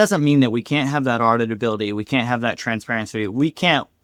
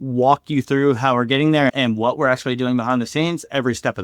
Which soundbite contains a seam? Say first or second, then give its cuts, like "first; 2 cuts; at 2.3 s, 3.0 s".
second; 1 cut; at 1.7 s